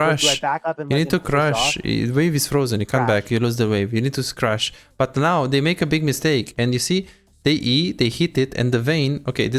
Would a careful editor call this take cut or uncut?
uncut